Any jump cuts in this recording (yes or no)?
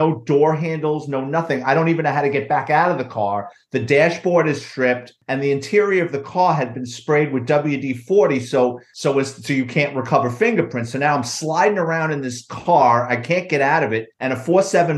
no